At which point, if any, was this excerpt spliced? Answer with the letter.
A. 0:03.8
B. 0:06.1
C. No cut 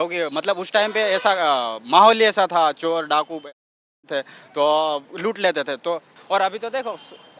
B